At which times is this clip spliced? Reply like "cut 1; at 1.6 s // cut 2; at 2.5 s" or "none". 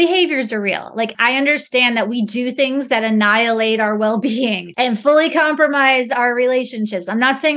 cut 1; at 1.1 s // cut 2; at 4.6 s